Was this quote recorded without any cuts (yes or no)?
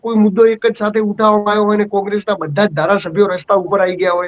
yes